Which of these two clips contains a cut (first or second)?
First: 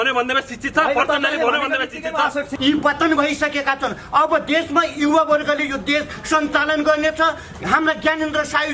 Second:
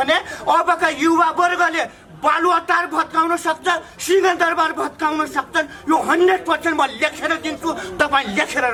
first